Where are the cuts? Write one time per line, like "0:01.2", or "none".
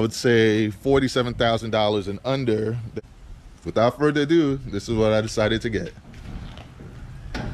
0:02.9